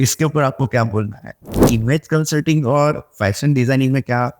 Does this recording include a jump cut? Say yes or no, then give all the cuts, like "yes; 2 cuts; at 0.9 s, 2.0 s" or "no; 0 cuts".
yes; 1 cut; at 1.6 s